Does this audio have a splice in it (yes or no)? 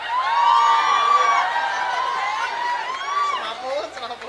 no